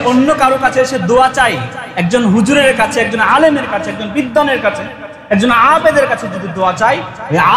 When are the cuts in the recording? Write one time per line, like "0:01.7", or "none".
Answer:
none